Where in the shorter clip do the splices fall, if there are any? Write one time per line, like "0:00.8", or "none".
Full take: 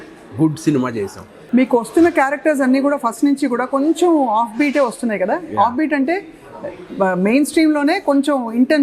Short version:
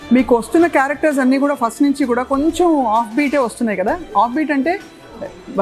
none